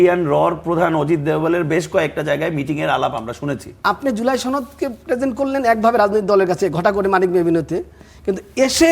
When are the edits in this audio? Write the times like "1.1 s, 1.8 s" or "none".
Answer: 3.8 s